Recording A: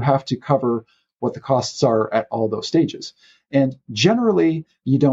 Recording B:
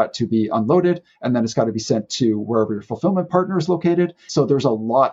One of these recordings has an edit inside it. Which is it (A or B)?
B